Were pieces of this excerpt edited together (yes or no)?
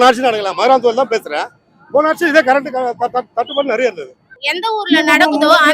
yes